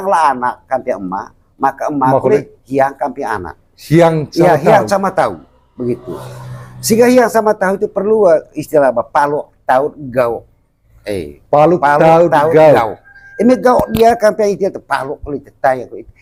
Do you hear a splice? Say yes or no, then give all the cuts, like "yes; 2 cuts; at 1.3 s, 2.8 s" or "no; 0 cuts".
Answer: no; 0 cuts